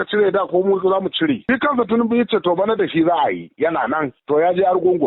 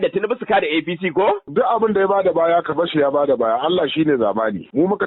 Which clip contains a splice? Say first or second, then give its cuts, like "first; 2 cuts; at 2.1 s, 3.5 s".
first; 1 cut; at 1.4 s